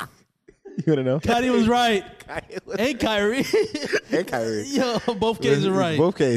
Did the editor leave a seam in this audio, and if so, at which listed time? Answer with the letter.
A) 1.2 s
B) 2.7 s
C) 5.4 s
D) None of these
A